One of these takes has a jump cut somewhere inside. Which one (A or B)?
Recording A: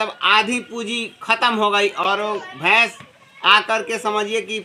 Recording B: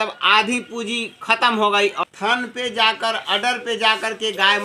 B